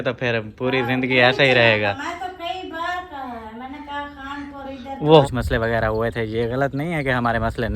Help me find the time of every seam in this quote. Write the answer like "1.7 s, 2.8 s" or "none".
5.2 s